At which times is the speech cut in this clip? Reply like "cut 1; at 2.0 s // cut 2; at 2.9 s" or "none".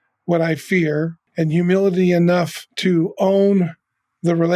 cut 1; at 1.2 s // cut 2; at 2.6 s